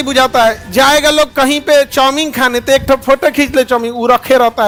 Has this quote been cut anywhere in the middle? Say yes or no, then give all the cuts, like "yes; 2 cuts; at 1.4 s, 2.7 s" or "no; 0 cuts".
no; 0 cuts